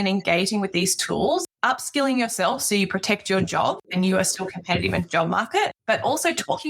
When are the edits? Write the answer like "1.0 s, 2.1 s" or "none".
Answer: 1.5 s, 3.8 s, 5.8 s

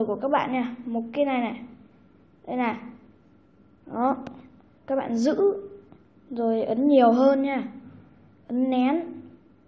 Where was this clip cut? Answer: none

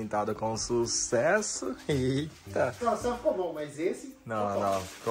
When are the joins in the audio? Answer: 2.8 s

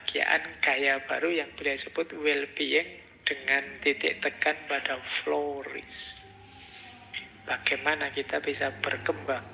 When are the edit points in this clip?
none

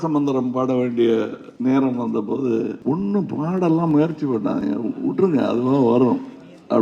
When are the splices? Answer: 1.4 s, 2.8 s

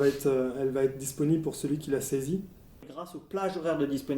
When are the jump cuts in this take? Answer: 3.0 s

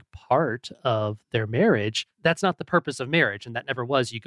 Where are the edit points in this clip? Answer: 2.0 s

